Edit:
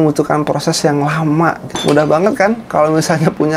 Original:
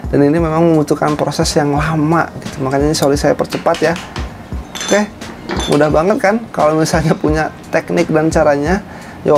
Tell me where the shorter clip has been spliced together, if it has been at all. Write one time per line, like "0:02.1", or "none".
0:01.7